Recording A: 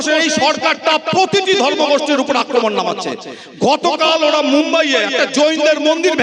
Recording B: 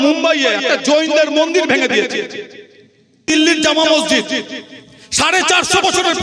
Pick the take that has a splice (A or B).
B